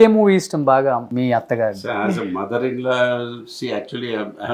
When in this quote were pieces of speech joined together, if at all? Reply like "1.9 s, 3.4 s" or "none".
1.1 s